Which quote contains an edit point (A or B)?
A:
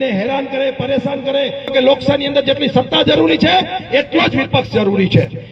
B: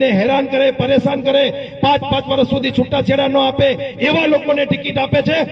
A